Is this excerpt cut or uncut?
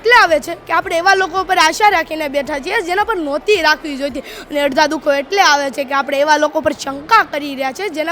uncut